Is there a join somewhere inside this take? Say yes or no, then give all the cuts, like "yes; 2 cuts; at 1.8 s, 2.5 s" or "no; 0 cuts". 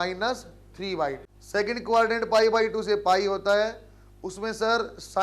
yes; 1 cut; at 1.3 s